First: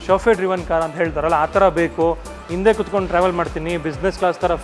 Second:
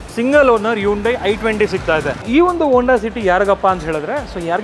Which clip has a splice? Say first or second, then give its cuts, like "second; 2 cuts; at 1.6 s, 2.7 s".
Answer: second; 1 cut; at 2.2 s